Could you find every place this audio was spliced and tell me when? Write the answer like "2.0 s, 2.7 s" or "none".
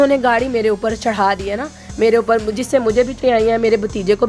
3.2 s